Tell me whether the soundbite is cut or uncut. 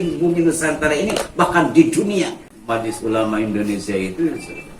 cut